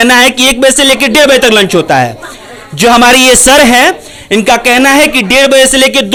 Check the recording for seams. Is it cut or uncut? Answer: uncut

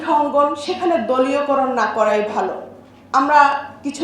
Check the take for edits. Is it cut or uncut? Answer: uncut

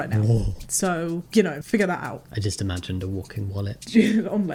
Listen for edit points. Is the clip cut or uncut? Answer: uncut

